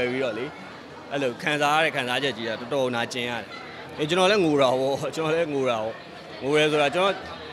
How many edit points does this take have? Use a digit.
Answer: 1